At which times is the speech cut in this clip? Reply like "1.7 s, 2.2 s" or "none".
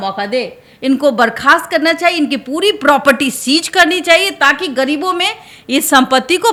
none